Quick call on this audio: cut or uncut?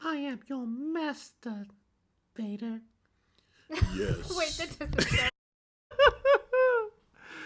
uncut